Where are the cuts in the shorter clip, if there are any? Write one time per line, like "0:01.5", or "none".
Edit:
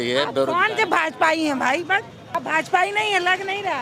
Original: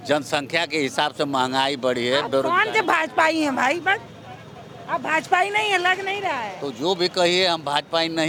0:02.2